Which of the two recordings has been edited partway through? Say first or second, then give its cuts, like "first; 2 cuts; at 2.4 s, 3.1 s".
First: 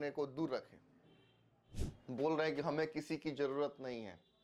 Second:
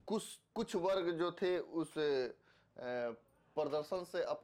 first; 1 cut; at 1.8 s